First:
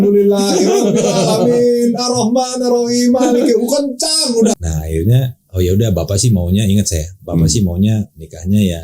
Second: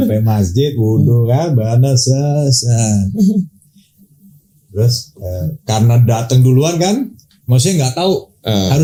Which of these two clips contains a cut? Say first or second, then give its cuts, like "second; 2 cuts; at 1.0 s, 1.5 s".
first; 1 cut; at 4.5 s